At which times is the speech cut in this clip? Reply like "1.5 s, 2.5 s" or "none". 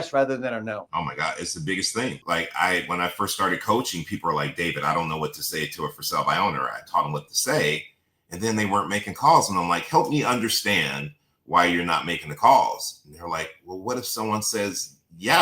0.8 s, 2.2 s